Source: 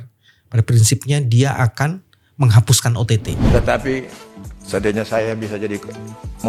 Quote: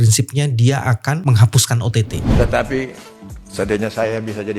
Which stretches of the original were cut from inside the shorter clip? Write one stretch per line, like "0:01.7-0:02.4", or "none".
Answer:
0:01.9-0:02.4